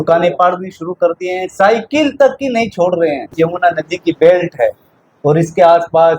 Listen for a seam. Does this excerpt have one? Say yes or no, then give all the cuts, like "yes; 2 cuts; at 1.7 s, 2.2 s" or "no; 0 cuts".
yes; 1 cut; at 3.3 s